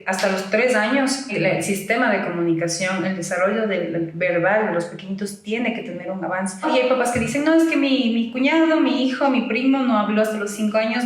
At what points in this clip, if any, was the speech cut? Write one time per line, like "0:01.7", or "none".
0:01.3
0:06.7

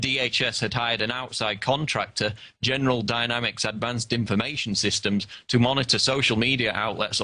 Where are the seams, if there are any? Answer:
0:03.4

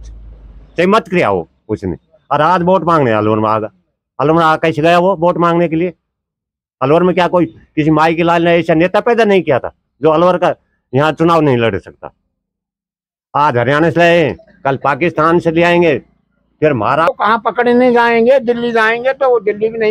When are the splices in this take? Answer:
0:17.1

